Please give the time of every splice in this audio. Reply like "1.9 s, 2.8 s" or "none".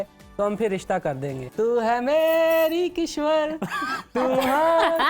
1.4 s